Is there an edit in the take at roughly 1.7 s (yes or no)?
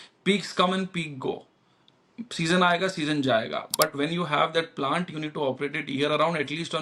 no